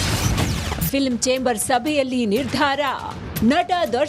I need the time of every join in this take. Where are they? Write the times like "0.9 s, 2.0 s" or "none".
2.9 s